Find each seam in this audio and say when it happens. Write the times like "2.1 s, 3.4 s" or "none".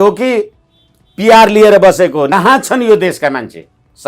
2.3 s